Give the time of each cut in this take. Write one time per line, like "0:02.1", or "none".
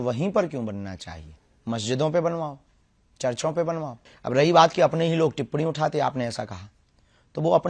0:04.0